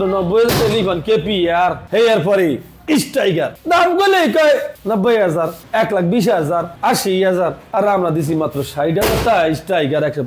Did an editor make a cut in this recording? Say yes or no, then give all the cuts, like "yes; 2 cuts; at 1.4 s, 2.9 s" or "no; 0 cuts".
no; 0 cuts